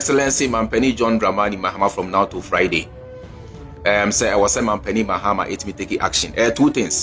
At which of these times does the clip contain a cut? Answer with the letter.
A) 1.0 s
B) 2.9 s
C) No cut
C